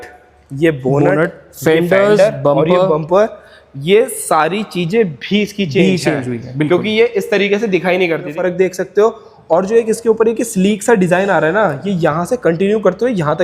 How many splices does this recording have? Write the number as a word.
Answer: one